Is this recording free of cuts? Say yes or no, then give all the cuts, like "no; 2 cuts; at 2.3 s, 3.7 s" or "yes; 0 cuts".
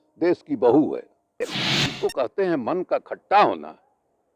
no; 1 cut; at 1.6 s